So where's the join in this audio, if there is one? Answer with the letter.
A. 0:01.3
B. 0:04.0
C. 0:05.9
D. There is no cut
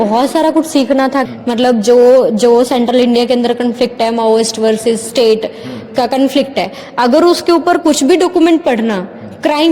A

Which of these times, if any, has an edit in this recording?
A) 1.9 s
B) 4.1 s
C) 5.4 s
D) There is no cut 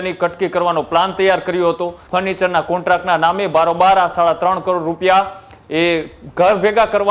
A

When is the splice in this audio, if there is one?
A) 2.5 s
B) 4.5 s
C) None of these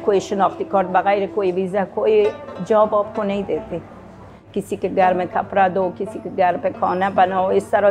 B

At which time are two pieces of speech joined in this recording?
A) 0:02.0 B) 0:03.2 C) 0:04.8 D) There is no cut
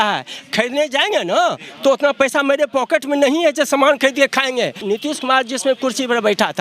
C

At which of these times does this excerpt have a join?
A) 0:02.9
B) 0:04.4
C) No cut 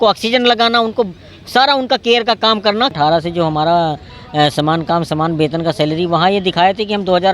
A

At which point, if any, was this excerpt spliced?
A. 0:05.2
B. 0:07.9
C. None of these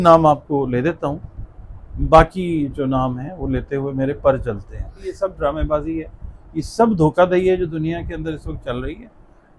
A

